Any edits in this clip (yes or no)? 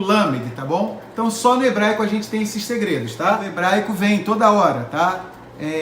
yes